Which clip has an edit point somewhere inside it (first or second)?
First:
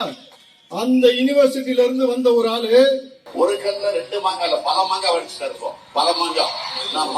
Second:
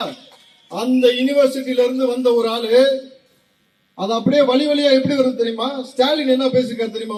first